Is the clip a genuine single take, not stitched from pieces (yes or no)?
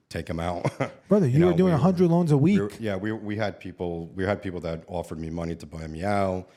yes